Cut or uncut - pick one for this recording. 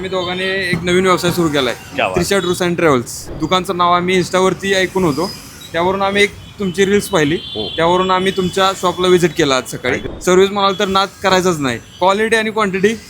cut